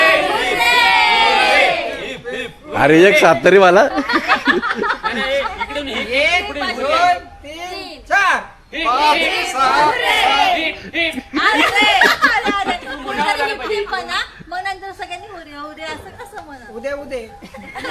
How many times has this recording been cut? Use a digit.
0